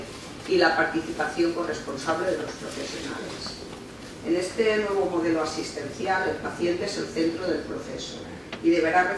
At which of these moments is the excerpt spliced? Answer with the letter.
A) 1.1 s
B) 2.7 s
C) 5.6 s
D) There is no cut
C